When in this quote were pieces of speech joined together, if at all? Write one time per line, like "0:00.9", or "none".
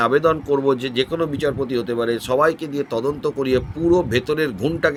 none